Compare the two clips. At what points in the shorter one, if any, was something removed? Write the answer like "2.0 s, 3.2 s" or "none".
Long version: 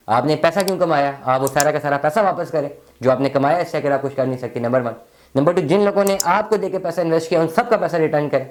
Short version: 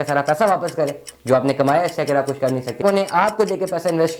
2.8 s